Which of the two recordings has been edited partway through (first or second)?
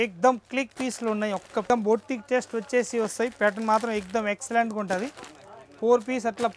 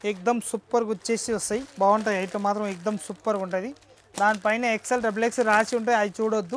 first